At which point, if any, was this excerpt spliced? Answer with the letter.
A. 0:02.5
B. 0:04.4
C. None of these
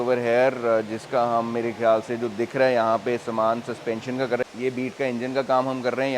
B